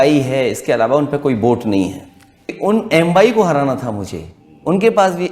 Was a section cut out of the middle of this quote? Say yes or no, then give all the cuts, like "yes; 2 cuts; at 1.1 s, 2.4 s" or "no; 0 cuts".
yes; 1 cut; at 2.4 s